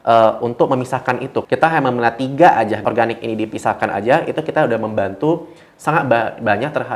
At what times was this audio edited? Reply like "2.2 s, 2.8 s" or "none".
1.4 s, 2.8 s